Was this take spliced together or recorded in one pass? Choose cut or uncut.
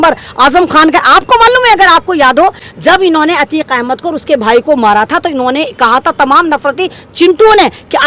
uncut